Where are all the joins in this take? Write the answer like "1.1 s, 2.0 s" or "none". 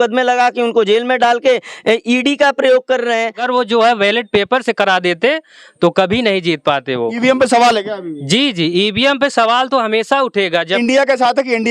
3.4 s, 10.7 s